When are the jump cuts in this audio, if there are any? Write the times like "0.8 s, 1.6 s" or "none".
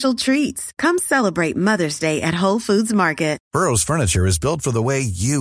3.4 s